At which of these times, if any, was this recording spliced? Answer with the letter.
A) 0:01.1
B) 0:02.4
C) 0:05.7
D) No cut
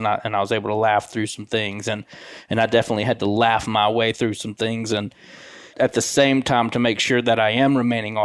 C